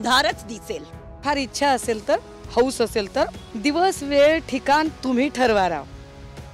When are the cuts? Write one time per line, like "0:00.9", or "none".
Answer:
0:01.2
0:03.4